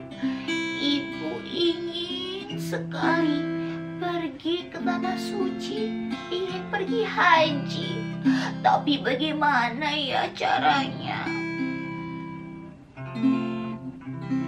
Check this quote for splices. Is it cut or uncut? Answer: uncut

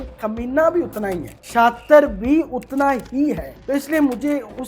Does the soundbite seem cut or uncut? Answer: cut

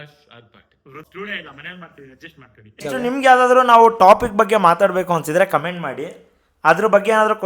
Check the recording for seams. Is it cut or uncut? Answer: cut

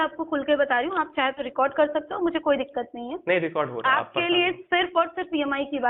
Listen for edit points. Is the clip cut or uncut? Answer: uncut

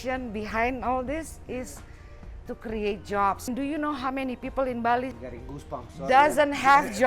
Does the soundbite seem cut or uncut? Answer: cut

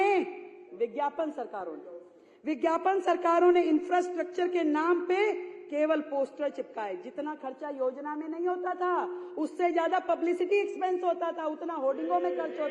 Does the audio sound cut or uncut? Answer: uncut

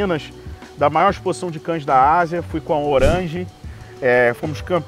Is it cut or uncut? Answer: uncut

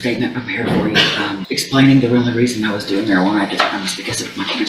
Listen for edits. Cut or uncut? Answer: cut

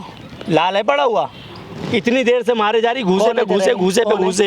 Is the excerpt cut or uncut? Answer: uncut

